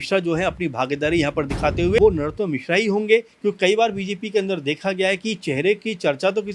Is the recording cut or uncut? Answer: cut